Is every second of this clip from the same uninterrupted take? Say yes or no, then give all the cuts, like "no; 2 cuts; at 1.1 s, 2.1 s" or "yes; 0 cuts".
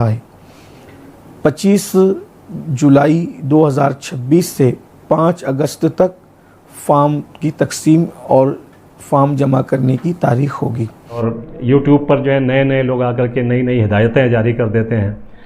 no; 1 cut; at 11.3 s